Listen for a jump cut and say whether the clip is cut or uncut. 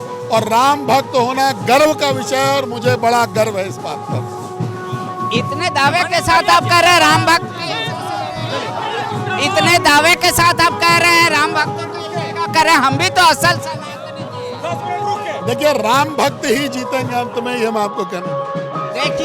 uncut